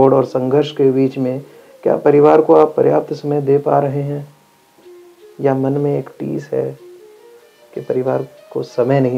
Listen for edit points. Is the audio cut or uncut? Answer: uncut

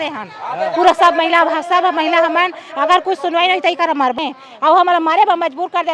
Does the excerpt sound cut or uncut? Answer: cut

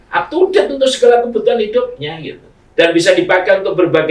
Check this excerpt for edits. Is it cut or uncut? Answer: uncut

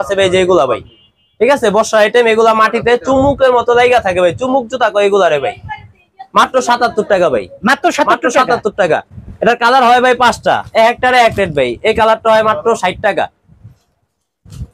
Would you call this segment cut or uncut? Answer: uncut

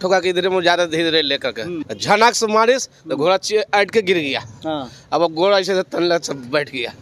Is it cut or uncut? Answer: cut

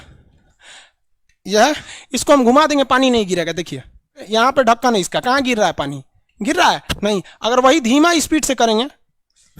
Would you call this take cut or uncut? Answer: cut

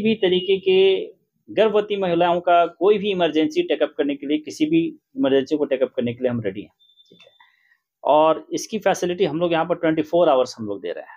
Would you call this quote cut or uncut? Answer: uncut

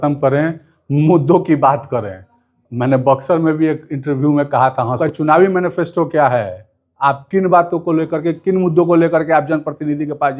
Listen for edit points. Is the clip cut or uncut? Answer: cut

